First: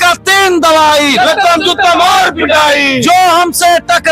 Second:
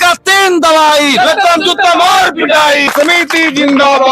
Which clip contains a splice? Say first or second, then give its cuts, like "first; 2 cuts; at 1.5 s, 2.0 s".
second; 1 cut; at 2.9 s